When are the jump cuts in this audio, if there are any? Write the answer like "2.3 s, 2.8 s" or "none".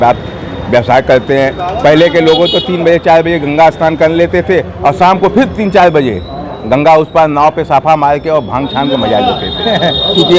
none